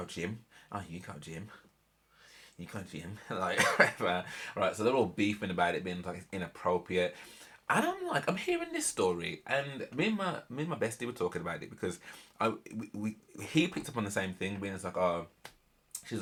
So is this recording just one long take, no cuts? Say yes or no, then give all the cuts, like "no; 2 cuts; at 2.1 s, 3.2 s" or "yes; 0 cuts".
yes; 0 cuts